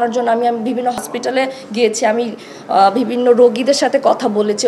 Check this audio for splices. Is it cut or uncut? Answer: cut